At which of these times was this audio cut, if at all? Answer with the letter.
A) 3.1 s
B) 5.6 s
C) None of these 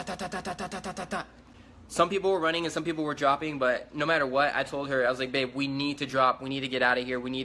B